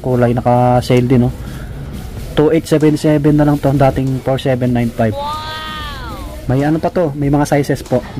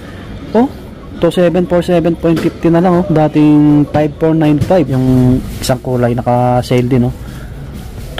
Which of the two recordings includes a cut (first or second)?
second